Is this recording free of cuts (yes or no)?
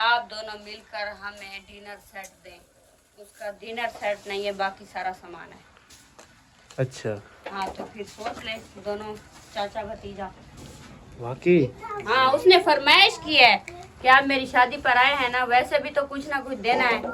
yes